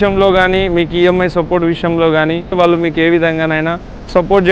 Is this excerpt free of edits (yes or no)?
no